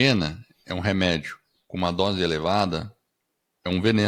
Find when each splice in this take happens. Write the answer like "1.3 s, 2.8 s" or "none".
none